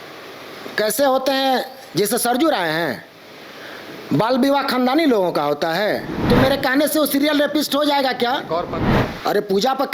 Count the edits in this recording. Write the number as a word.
two